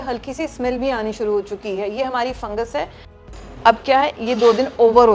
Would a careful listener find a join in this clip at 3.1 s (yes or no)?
yes